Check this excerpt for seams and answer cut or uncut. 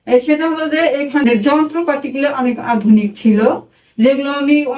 cut